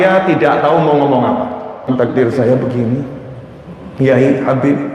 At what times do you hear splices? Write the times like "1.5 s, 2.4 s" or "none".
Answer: 1.9 s